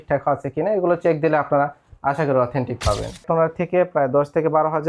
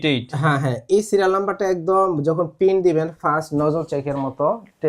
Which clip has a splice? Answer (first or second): first